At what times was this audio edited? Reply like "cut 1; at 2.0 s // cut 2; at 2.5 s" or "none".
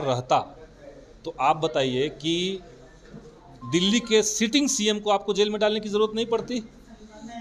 none

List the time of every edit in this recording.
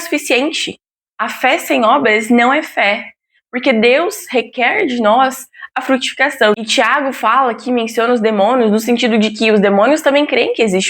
cut 1; at 6.5 s

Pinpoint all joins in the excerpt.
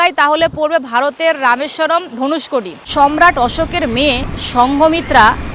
cut 1; at 2.8 s

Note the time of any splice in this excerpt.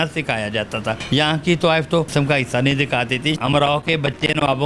cut 1; at 1.0 s // cut 2; at 2.1 s // cut 3; at 3.4 s

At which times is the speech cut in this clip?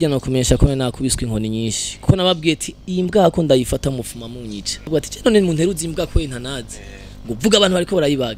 cut 1; at 4.9 s

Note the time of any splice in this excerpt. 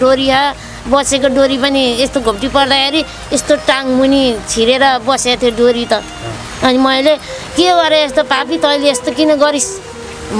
none

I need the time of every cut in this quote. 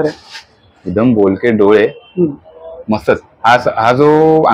none

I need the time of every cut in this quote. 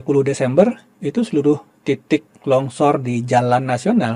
none

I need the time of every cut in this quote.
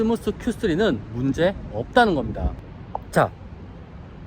cut 1; at 2.6 s

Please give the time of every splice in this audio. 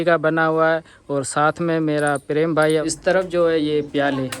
cut 1; at 2.8 s

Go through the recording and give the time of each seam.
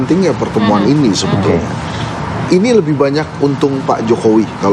none

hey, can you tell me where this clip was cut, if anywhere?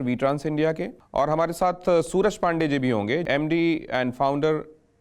cut 1; at 1.0 s // cut 2; at 3.2 s

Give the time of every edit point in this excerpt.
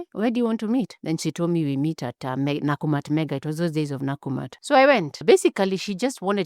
cut 1; at 4.5 s // cut 2; at 5.2 s

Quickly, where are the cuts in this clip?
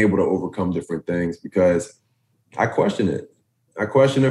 none

